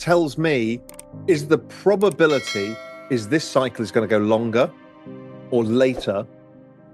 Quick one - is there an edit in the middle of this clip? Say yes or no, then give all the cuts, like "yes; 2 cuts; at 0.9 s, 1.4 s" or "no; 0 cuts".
no; 0 cuts